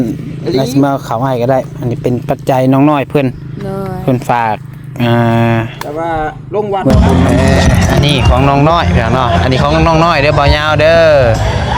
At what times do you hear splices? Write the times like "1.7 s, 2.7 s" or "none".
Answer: 6.9 s